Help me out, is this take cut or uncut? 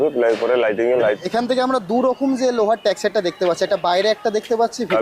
cut